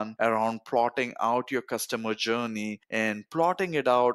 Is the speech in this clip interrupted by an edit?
no; 0 cuts

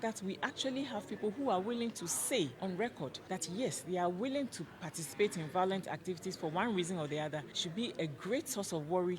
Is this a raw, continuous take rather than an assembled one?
no; 2 cuts; at 2.9 s, 7.6 s

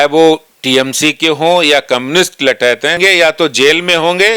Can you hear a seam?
yes; 1 cut; at 3.0 s

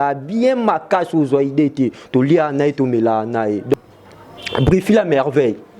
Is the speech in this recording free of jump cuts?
no; 1 cut; at 3.8 s

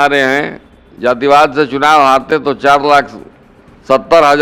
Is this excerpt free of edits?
yes; 0 cuts

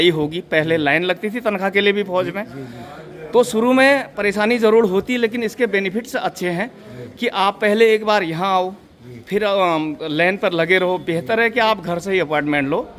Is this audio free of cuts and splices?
yes; 0 cuts

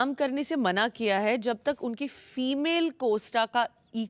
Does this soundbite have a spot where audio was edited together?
no; 0 cuts

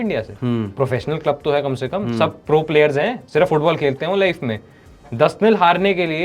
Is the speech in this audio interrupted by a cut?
no; 0 cuts

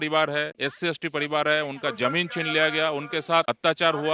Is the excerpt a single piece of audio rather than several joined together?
yes; 0 cuts

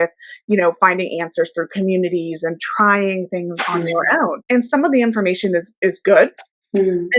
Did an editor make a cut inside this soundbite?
yes; 1 cut; at 4.4 s

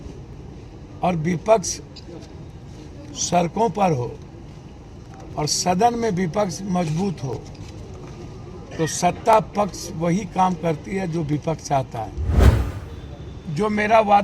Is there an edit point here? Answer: yes; 1 cut; at 12.5 s

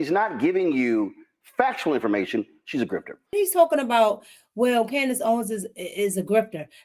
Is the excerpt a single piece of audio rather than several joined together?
no; 1 cut; at 3.3 s

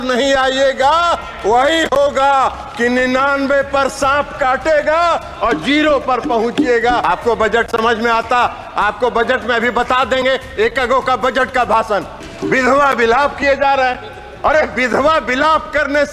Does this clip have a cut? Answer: yes; 2 cuts; at 7.0 s, 12.2 s

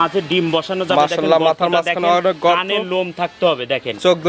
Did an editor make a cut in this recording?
no; 0 cuts

